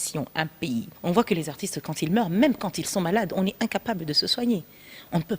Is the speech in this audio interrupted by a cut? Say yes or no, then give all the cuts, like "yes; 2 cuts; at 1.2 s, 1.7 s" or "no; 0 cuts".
yes; 1 cut; at 0.9 s